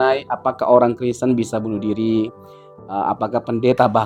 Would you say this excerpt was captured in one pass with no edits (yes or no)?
yes